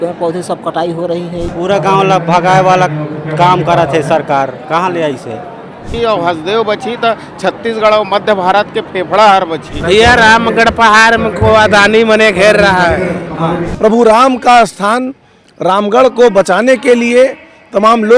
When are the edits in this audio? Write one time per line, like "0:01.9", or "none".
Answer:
0:01.5
0:05.9
0:09.7
0:13.6